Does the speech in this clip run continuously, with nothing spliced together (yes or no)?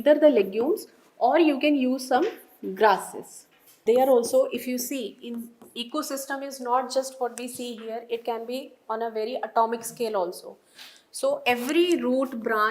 no